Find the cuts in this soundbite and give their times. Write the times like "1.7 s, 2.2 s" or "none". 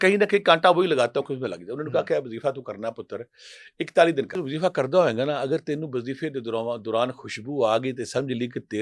4.4 s